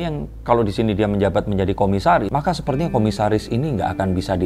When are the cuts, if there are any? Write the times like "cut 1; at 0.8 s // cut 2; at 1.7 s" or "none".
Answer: cut 1; at 2.3 s